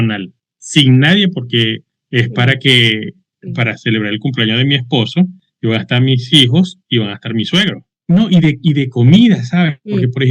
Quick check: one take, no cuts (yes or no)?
no